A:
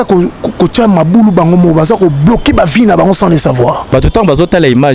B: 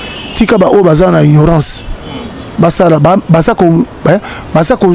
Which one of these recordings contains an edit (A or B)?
A